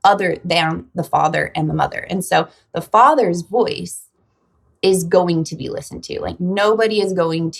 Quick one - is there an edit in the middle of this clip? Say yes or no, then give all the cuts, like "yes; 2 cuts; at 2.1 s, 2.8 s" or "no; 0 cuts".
no; 0 cuts